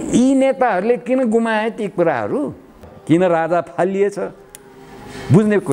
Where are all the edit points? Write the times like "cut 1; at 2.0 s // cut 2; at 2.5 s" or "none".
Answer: cut 1; at 2.9 s